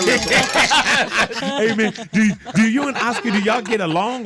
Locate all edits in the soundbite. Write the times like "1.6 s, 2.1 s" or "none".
1.4 s